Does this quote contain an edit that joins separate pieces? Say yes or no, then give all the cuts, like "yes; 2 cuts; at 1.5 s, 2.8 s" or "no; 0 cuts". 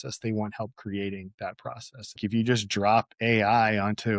yes; 1 cut; at 2.2 s